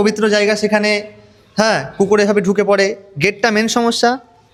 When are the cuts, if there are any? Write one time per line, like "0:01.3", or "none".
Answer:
none